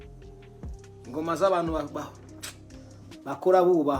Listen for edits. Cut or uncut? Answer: cut